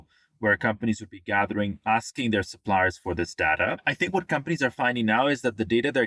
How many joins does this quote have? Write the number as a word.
one